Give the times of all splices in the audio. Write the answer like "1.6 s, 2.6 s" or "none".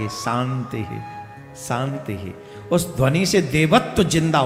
none